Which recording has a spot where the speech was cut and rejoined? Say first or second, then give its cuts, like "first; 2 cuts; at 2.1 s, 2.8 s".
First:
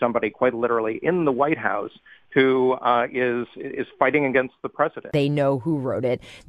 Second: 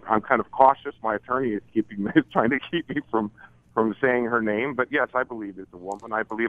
first; 1 cut; at 5.1 s